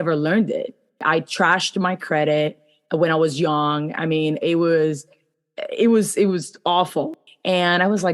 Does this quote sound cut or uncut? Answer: cut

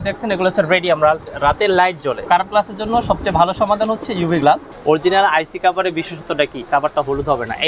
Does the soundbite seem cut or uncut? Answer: cut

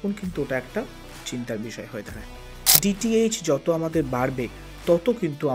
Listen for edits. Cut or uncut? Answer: cut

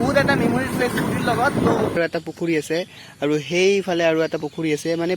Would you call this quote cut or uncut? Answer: cut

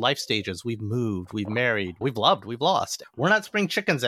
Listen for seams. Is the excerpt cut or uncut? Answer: cut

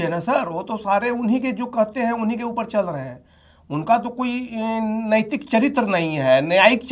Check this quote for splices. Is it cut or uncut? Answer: uncut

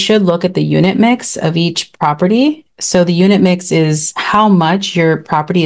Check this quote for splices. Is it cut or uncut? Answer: uncut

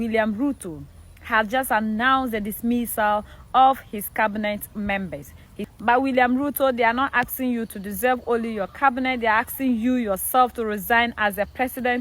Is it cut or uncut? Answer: cut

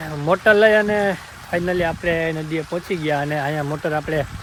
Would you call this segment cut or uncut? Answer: uncut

